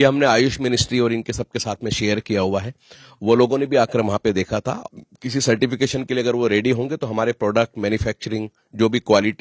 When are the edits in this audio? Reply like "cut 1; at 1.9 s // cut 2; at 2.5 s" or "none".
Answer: cut 1; at 4.8 s